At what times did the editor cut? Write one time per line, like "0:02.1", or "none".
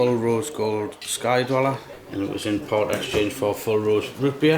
0:01.9